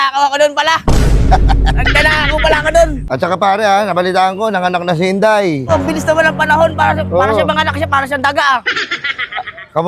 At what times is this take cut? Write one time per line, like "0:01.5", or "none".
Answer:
0:03.0